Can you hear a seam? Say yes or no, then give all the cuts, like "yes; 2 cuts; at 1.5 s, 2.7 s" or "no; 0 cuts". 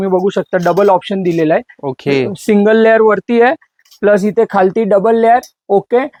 no; 0 cuts